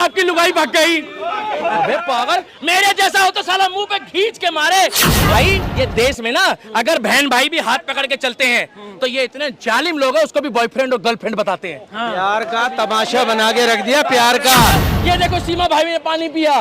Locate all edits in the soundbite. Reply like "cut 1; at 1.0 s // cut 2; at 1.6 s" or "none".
cut 1; at 5.3 s // cut 2; at 14.7 s